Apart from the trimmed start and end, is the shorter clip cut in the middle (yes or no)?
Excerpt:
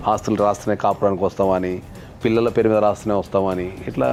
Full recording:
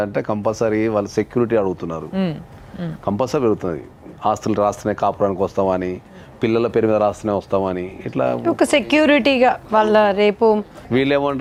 no